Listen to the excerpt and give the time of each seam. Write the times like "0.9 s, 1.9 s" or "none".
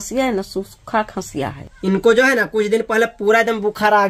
1.7 s